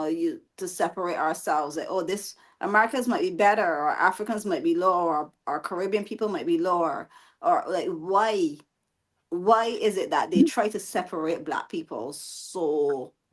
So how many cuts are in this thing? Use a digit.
0